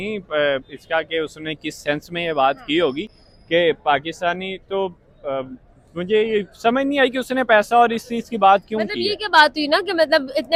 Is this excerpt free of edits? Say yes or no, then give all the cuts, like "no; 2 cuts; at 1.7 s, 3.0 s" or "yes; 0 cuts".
yes; 0 cuts